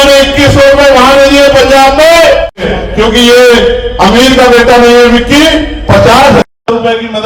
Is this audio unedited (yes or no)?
no